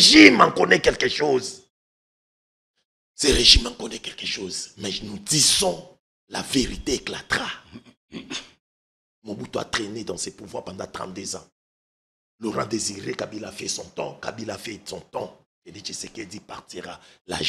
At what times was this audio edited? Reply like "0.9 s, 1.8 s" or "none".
none